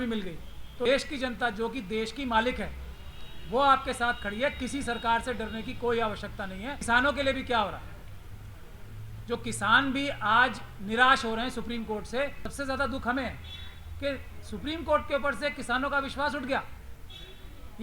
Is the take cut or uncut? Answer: cut